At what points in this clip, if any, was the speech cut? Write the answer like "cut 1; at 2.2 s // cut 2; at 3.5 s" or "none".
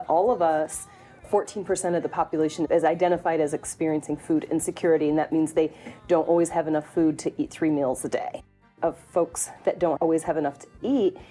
cut 1; at 8.5 s // cut 2; at 10.0 s